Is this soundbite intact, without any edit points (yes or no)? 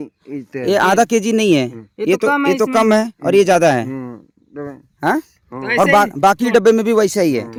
yes